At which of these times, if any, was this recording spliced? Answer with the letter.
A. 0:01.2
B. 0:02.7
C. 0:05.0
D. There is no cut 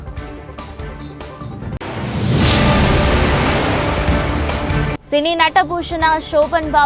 C